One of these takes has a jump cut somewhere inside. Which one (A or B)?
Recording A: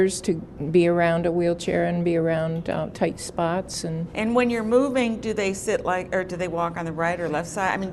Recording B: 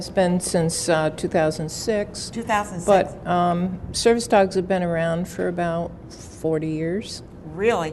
B